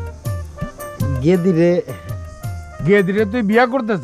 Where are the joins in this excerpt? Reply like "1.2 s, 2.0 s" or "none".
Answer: none